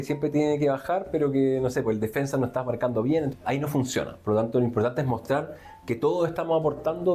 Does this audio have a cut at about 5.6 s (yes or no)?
no